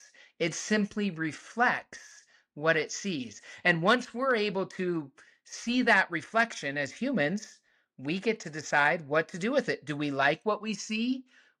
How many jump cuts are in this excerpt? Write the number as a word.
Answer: zero